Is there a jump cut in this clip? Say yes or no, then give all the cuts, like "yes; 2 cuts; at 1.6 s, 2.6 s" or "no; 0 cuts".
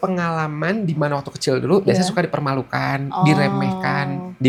no; 0 cuts